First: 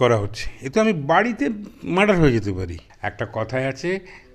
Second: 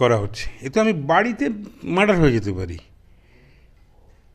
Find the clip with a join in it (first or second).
first